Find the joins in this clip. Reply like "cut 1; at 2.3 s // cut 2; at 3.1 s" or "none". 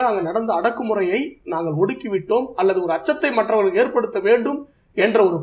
none

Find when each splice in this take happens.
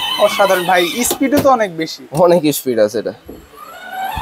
none

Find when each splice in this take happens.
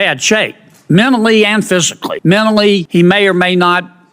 cut 1; at 2.0 s // cut 2; at 2.9 s

